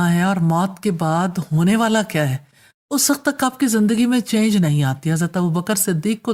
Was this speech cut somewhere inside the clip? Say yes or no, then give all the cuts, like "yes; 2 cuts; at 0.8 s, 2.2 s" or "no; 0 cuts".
no; 0 cuts